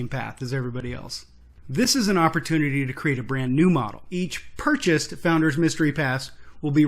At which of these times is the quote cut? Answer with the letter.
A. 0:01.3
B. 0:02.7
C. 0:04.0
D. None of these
C